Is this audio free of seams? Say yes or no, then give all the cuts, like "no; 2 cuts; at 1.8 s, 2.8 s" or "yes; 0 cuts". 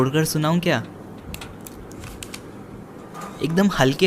no; 2 cuts; at 1.0 s, 2.8 s